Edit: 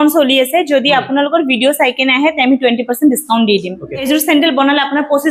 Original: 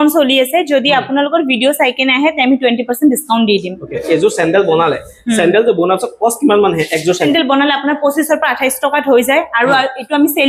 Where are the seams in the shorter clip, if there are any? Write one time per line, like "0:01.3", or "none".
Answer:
0:04.1